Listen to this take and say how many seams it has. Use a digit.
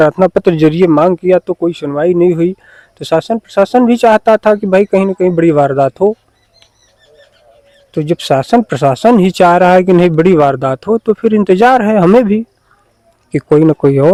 0